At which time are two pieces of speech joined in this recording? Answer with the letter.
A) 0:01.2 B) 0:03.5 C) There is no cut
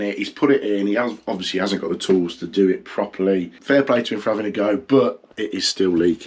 B